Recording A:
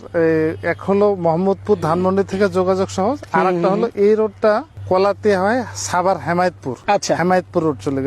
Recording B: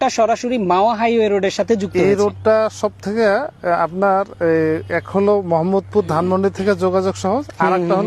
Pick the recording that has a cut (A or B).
A